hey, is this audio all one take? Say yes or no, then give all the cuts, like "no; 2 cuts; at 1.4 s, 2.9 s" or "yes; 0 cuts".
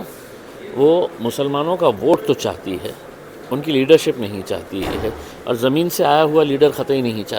yes; 0 cuts